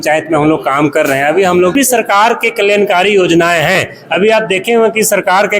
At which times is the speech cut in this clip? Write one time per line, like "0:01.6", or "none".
0:01.7